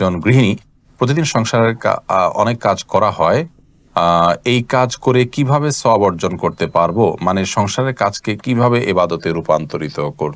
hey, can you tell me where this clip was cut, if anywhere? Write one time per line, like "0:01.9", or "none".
none